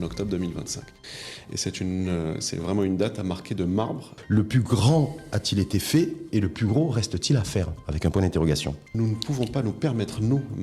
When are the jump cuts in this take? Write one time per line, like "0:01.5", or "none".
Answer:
0:04.1
0:08.8